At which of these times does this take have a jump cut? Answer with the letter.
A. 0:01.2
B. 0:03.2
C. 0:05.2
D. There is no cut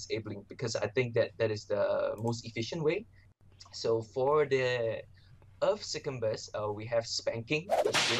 B